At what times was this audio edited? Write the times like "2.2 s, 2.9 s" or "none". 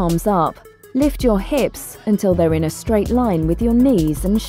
none